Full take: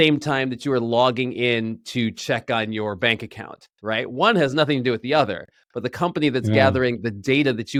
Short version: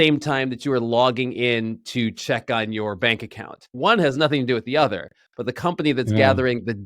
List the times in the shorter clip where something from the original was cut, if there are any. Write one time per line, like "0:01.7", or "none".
0:03.7